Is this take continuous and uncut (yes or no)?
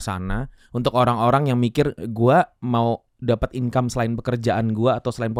yes